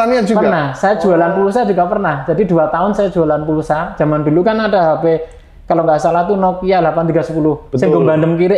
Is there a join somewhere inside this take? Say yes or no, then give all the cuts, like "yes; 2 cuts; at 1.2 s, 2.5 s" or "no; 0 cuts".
no; 0 cuts